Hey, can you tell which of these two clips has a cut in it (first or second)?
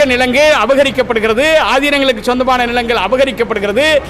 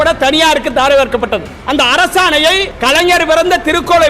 second